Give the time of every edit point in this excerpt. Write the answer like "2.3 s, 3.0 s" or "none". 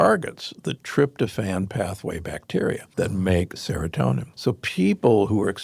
2.8 s, 4.3 s